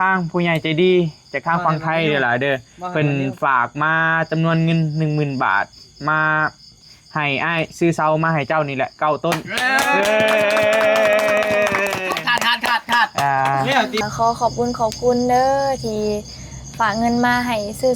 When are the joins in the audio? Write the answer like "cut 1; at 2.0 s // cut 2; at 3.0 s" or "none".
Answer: cut 1; at 14.0 s